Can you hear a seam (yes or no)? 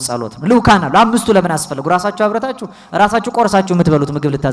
no